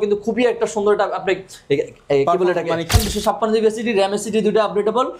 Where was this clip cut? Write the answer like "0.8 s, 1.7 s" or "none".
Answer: 2.9 s